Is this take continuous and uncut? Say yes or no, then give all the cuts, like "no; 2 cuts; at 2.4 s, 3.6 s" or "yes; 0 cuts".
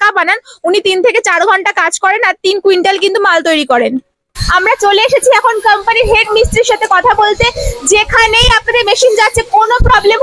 no; 1 cut; at 4.5 s